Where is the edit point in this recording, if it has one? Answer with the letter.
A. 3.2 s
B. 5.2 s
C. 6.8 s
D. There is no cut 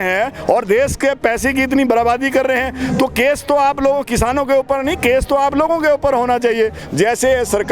C